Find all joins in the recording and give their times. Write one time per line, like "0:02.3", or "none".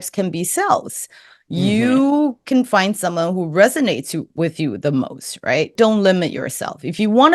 0:05.7